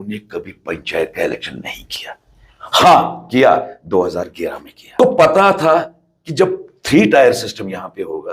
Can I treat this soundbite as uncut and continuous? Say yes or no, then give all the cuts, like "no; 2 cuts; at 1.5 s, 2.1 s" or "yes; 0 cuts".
no; 1 cut; at 5.0 s